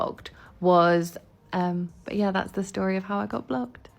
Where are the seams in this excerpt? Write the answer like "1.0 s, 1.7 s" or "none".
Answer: 1.2 s